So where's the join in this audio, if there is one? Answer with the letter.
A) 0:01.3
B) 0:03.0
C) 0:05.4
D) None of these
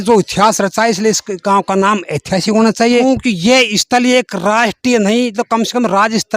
B